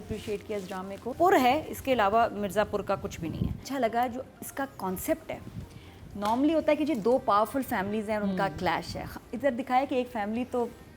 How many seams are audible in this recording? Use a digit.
2